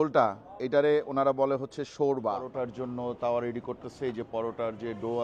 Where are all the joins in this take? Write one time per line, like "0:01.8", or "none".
0:02.4